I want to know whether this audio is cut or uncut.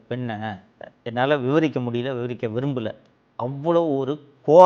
cut